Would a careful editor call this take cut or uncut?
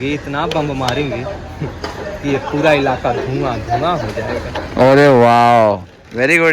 uncut